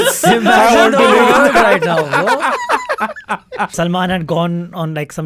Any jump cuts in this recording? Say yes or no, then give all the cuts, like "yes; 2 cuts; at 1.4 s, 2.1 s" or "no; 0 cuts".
yes; 1 cut; at 3.7 s